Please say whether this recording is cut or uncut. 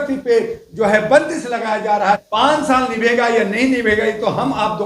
cut